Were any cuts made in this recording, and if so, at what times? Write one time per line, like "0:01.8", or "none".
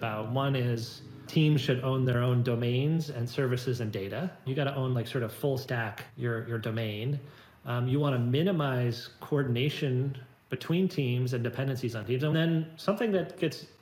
0:01.2
0:04.5
0:06.0
0:12.3